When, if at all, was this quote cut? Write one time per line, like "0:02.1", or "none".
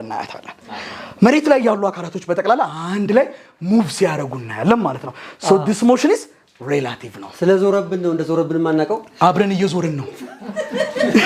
none